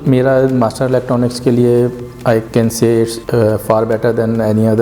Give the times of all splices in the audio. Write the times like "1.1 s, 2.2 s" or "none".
2.5 s, 3.2 s